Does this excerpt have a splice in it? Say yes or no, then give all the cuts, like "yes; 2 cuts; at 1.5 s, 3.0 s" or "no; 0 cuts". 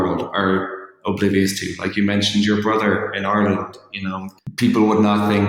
yes; 1 cut; at 4.3 s